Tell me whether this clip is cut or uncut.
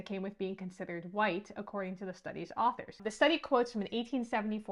cut